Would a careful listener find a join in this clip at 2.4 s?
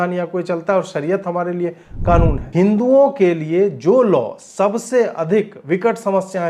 yes; 1 cut; at 2.4 s

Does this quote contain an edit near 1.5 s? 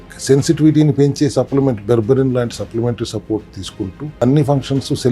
no; 1 cut; at 4.2 s

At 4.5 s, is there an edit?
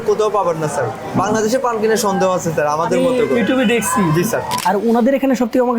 yes; 1 cut; at 4.5 s

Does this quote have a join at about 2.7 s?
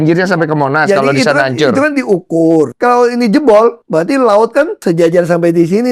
yes; 3 cuts; at 2.7 s, 3.8 s, 4.8 s

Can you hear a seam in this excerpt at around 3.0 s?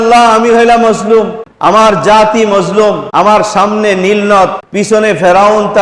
yes; 3 cuts; at 1.4 s, 3.0 s, 4.6 s

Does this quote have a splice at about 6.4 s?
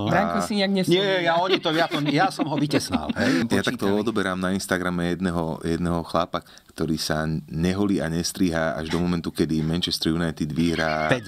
yes; 2 cuts; at 3.5 s, 6.4 s

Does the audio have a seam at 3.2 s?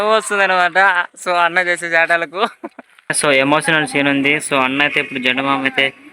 yes; 1 cut; at 3.2 s

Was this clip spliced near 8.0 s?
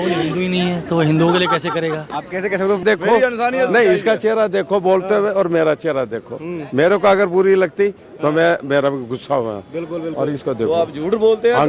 no; 1 cut; at 2.8 s

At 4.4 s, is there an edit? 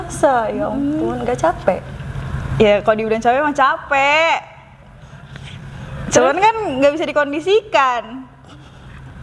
no; 0 cuts

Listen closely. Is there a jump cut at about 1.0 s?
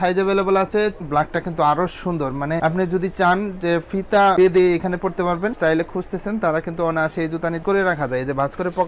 yes; 3 cuts; at 1.0 s, 5.5 s, 7.6 s

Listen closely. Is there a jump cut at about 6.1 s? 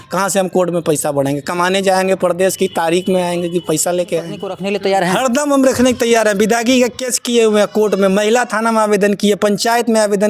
no; 1 cut; at 4.5 s

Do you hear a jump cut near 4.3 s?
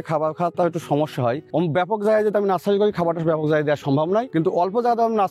yes; 1 cut; at 4.3 s

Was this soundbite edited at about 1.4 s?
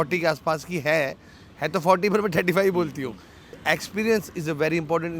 no; 1 cut; at 3.6 s

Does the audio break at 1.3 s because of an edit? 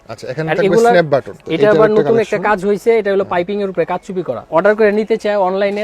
yes; 2 cuts; at 1.3 s, 4.4 s

